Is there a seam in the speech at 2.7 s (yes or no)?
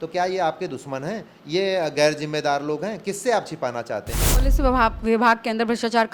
no